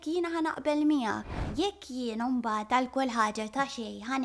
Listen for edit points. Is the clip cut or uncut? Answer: cut